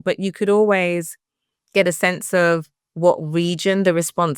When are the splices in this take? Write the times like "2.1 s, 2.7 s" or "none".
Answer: none